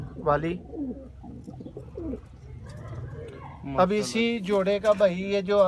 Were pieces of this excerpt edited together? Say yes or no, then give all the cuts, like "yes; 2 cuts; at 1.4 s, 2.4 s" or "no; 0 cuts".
no; 0 cuts